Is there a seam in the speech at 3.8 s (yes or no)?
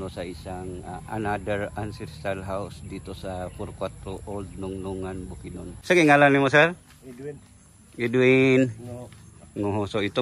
no